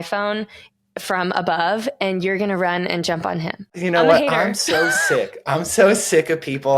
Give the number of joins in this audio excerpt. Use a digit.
1